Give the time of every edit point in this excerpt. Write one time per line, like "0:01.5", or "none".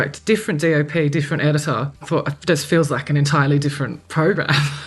0:02.1